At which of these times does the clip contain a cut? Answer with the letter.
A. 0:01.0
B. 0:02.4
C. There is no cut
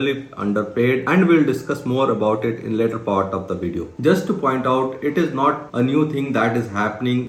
C